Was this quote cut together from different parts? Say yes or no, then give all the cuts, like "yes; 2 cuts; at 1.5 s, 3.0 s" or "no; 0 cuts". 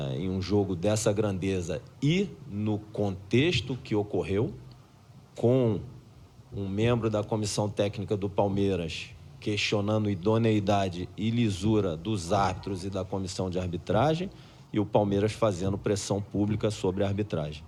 no; 0 cuts